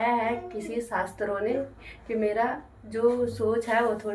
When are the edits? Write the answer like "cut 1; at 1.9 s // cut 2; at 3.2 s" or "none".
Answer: none